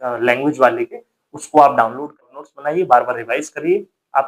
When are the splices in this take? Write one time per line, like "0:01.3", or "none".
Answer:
0:02.2